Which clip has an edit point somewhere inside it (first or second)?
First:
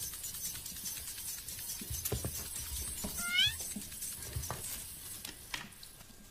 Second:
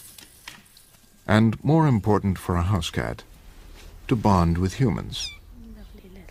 first